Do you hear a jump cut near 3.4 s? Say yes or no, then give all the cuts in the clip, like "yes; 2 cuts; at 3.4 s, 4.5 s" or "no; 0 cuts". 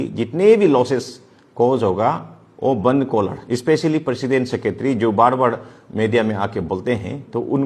yes; 1 cut; at 3.4 s